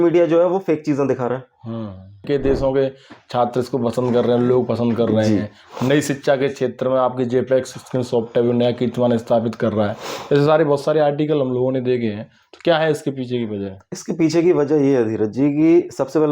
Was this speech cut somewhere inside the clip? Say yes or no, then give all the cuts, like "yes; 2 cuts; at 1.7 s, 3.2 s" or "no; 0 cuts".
yes; 1 cut; at 2.3 s